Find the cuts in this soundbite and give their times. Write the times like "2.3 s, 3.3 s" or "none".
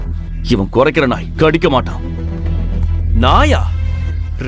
none